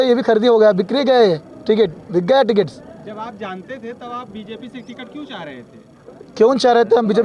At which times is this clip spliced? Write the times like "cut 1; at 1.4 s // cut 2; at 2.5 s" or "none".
none